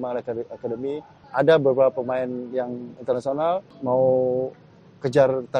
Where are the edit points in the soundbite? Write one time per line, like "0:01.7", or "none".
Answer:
0:01.2
0:03.7